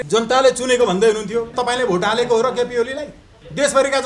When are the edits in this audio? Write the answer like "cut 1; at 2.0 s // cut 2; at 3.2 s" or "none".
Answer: cut 1; at 1.5 s